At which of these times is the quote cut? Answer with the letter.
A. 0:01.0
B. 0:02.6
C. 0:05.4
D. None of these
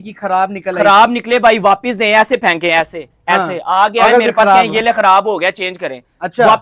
D